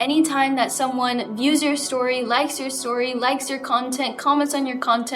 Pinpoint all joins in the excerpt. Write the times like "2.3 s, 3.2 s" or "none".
none

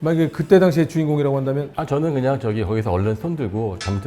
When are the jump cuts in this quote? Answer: none

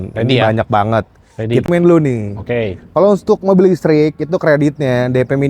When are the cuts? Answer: 1.6 s

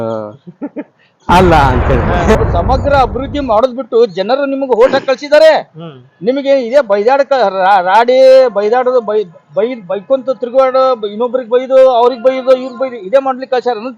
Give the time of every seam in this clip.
2.4 s

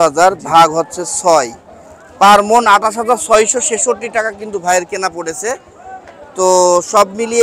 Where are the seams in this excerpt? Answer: none

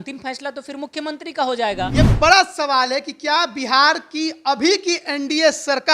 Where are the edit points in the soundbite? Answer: 1.9 s

